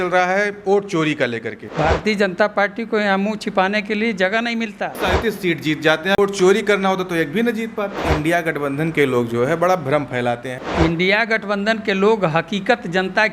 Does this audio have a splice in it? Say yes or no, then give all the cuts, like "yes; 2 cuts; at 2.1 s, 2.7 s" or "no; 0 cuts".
yes; 5 cuts; at 1.7 s, 5.0 s, 6.2 s, 8.0 s, 10.5 s